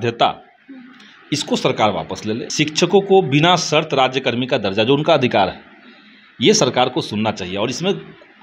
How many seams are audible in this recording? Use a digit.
1